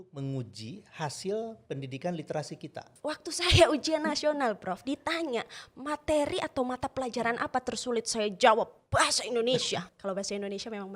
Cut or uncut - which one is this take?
cut